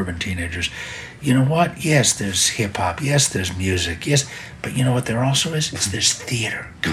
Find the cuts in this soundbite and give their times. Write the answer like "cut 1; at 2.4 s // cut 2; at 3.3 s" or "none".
none